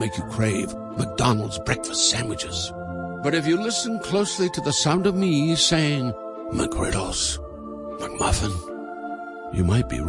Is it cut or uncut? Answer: uncut